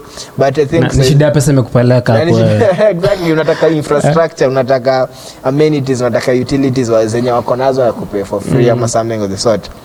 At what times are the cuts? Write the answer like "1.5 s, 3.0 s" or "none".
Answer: none